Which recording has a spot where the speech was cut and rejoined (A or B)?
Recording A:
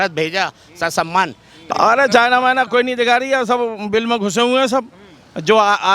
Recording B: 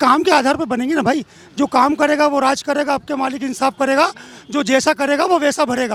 A